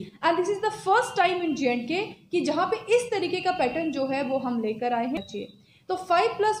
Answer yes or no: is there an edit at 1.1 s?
no